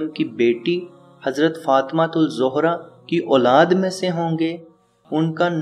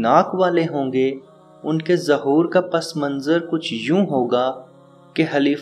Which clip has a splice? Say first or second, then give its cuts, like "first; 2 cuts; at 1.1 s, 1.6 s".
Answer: first; 1 cut; at 2.9 s